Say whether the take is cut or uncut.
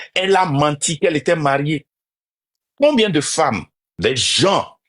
cut